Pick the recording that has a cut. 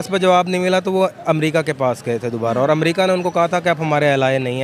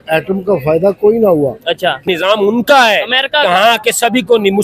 second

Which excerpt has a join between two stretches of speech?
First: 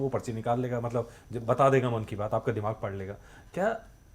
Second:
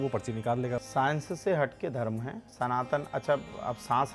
second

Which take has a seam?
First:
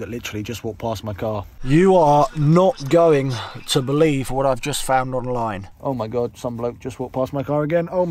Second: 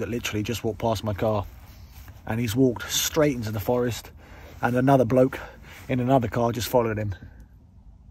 first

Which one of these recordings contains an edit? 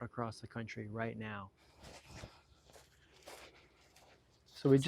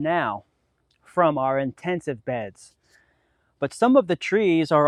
first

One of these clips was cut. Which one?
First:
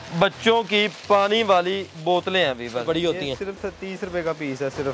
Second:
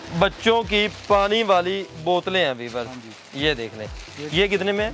first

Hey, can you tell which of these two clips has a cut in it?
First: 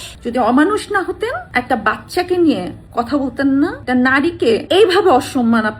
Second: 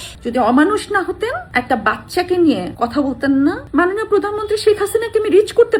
second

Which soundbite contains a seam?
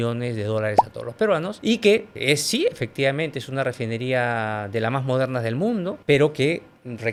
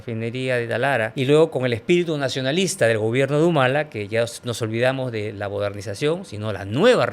second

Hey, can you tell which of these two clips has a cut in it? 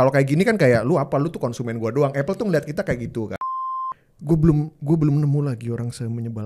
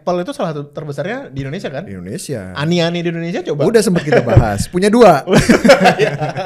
first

